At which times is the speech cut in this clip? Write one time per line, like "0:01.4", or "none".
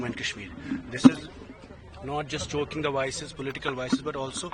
none